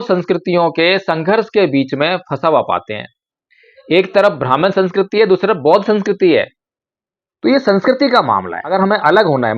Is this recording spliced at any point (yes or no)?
yes